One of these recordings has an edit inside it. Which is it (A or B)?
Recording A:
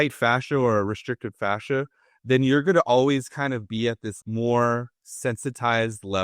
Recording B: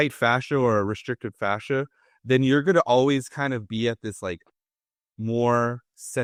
A